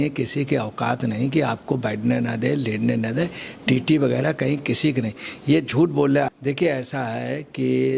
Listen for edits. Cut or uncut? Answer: cut